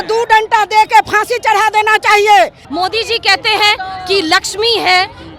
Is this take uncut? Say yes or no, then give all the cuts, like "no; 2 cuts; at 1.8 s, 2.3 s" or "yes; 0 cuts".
no; 1 cut; at 2.6 s